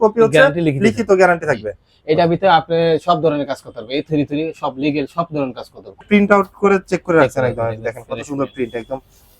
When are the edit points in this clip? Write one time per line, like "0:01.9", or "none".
0:06.0